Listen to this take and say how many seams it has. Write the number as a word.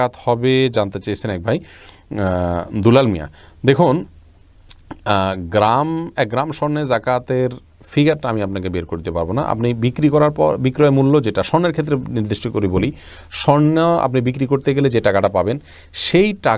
zero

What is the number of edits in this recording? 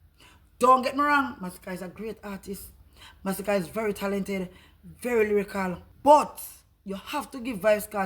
one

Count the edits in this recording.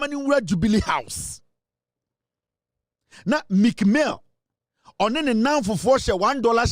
zero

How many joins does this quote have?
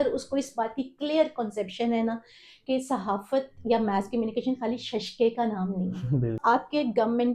one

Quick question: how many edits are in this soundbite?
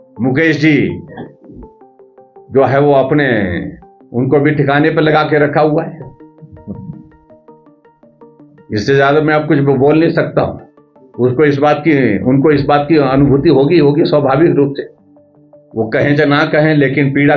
two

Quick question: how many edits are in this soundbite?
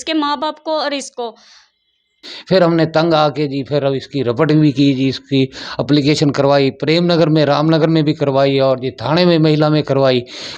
one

